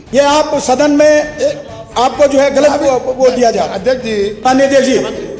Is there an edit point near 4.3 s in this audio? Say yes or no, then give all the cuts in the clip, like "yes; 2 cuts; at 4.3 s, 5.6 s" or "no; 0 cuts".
yes; 1 cut; at 4.3 s